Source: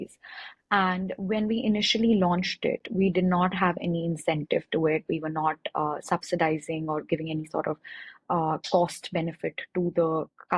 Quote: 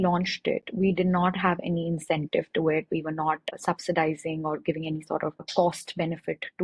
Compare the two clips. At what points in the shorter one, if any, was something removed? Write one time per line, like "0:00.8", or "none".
0:03.5
0:05.5